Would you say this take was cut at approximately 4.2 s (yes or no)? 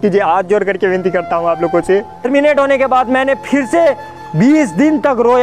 no